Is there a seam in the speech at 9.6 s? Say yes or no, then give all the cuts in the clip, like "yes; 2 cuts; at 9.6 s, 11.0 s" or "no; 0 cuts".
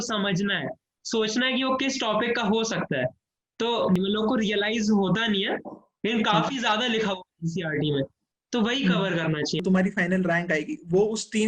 yes; 2 cuts; at 4.0 s, 9.6 s